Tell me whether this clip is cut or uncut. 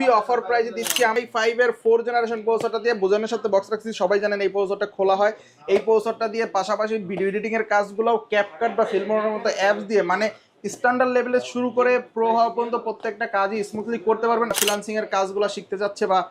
cut